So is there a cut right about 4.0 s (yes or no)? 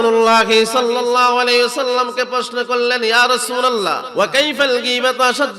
yes